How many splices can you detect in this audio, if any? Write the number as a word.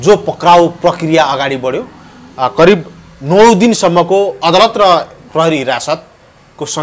zero